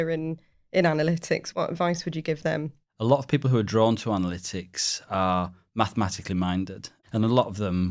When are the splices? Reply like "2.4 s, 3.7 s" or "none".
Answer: 1.5 s, 2.8 s